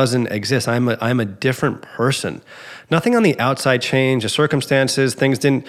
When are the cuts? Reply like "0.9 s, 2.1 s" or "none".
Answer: none